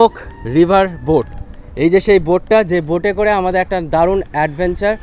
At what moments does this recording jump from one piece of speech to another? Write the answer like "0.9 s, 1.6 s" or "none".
none